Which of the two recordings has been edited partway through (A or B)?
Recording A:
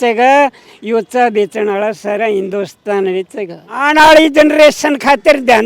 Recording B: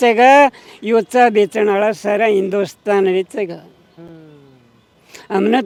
A